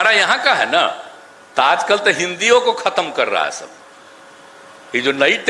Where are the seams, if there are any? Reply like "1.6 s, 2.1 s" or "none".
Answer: none